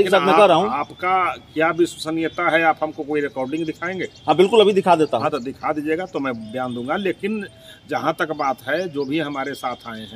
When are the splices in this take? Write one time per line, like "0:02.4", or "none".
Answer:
none